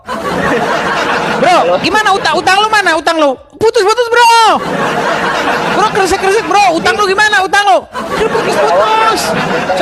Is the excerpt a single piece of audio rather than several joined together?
yes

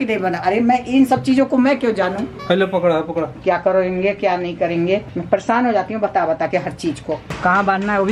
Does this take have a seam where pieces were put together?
no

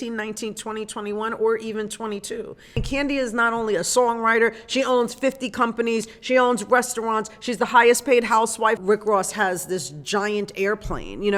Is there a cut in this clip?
yes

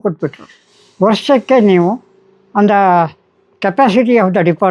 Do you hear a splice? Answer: no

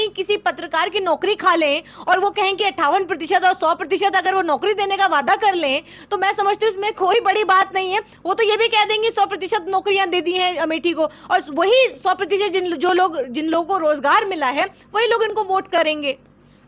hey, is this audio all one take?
yes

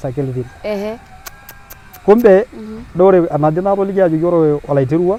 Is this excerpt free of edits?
yes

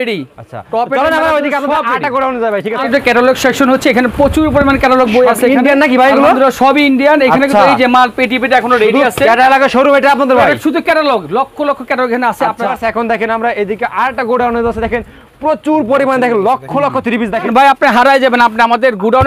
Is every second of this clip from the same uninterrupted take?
no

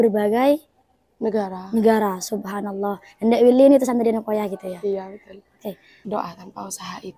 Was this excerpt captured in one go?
no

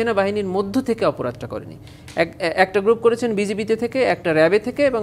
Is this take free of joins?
yes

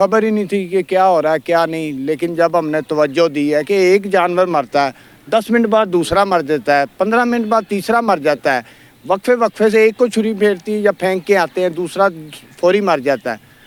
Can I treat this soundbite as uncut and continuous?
yes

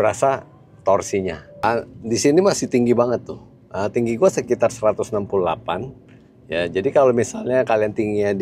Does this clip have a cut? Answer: yes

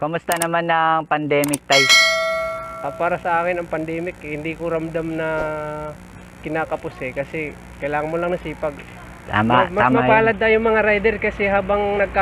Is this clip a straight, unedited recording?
yes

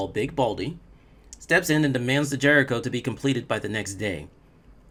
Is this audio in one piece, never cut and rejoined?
yes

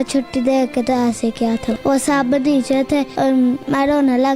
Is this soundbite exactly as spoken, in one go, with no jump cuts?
no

